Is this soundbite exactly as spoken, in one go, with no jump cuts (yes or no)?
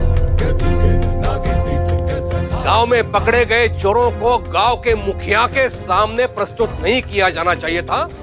yes